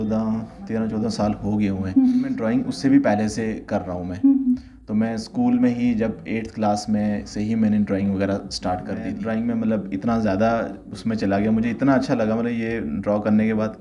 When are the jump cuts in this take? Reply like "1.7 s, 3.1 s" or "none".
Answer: 2.4 s, 9.2 s